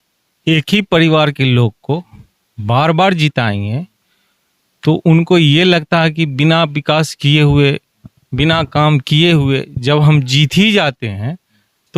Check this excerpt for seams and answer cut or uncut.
uncut